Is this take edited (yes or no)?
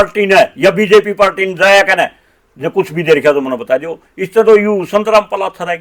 no